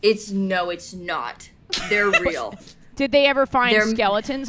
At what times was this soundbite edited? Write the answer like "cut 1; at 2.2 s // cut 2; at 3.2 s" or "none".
none